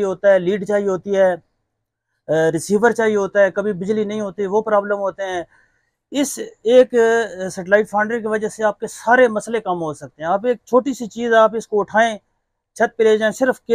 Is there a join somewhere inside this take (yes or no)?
no